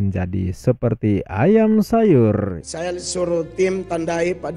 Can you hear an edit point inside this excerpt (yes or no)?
yes